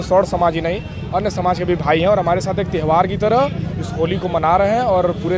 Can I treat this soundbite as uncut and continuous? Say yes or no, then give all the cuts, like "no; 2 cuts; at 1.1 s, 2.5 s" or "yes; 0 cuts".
yes; 0 cuts